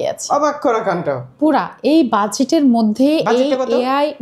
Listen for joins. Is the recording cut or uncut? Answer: uncut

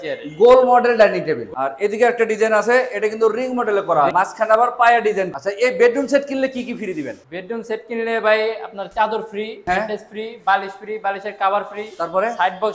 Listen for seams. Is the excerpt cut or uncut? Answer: cut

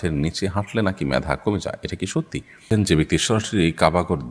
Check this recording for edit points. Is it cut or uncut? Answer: cut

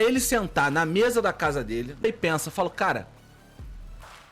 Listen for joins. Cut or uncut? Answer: cut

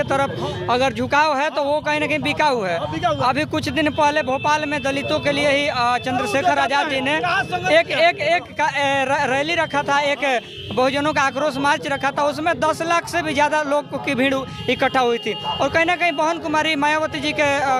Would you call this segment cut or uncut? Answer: uncut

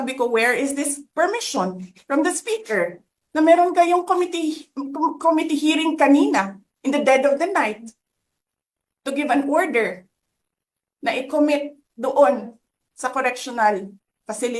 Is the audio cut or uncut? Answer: uncut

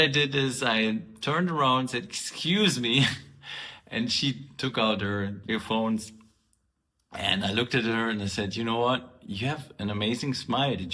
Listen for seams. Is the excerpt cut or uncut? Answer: cut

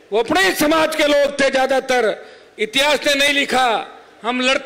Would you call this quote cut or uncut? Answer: uncut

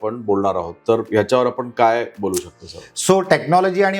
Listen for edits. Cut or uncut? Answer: uncut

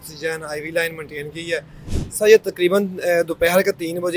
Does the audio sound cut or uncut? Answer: cut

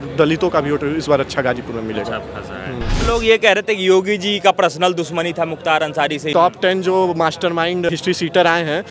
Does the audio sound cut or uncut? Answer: cut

